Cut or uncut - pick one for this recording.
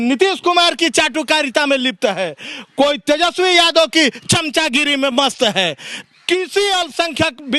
uncut